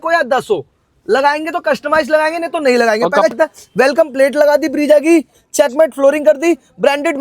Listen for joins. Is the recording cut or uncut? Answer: cut